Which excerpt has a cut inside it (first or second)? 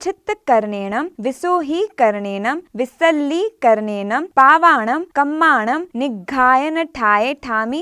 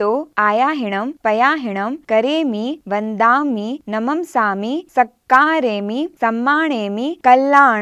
first